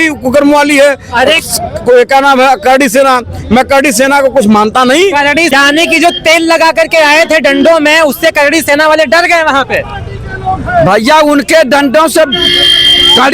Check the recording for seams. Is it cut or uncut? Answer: cut